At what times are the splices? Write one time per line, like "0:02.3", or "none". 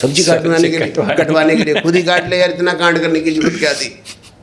none

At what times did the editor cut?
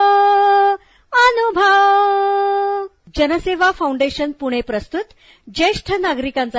none

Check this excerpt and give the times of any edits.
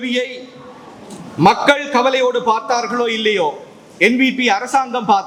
none

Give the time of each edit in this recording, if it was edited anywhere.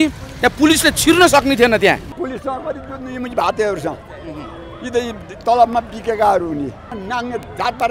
0:02.2
0:06.9

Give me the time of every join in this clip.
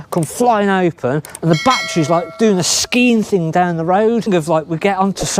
0:04.3

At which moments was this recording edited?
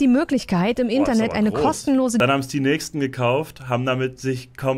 0:02.2

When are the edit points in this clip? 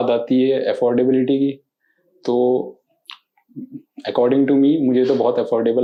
none

